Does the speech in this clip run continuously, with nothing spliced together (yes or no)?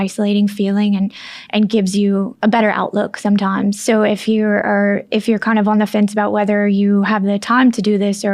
no